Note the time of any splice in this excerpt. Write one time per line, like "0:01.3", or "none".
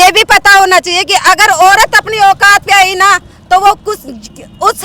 none